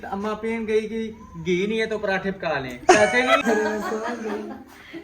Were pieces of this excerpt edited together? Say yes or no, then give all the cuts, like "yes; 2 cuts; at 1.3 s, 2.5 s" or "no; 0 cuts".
yes; 1 cut; at 3.4 s